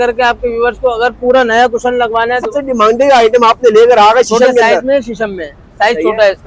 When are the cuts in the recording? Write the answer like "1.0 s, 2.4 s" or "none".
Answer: none